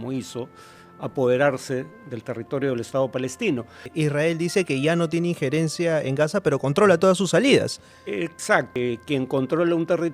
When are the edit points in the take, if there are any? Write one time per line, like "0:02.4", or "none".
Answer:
0:03.9
0:08.7